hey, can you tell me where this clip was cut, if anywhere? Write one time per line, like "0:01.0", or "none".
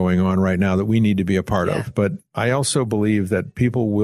0:02.2